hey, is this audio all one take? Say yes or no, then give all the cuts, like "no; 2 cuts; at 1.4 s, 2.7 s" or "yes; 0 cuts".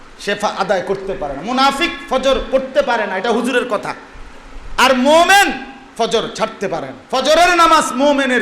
no; 1 cut; at 7.0 s